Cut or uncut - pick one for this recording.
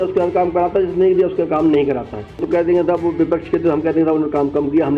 cut